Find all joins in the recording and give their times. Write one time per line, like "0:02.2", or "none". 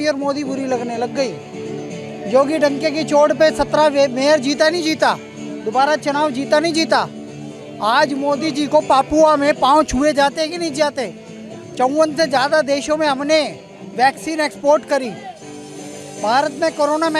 none